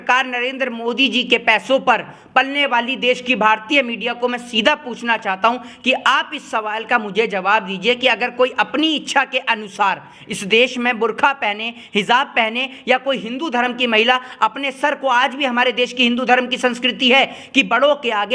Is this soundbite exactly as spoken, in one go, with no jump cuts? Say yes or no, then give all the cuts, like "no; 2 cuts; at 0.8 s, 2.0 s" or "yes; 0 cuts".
yes; 0 cuts